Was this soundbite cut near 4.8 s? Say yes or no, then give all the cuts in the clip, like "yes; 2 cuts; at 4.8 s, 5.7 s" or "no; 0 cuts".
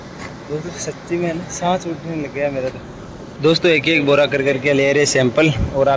no; 1 cut; at 3.3 s